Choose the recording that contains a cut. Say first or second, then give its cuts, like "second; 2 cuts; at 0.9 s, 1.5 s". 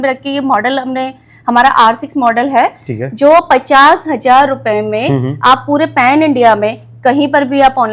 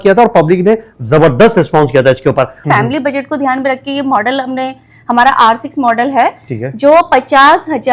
second; 1 cut; at 2.6 s